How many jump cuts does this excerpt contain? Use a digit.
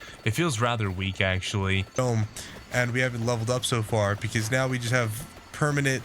1